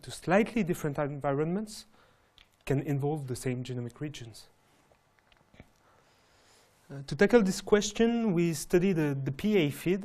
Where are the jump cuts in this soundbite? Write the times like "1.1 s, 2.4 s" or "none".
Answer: 6.8 s